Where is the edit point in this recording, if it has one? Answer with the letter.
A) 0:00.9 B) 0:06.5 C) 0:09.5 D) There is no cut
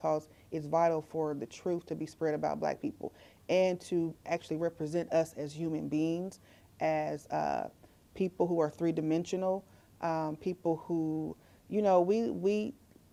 D